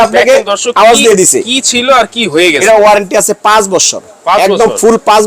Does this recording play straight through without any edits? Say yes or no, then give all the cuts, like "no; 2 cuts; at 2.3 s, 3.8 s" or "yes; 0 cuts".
no; 1 cut; at 2.6 s